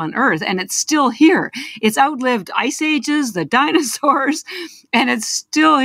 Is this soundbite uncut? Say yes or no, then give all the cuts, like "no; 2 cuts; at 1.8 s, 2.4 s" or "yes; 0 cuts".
yes; 0 cuts